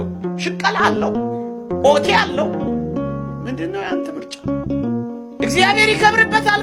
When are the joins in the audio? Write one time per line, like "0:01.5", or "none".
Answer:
none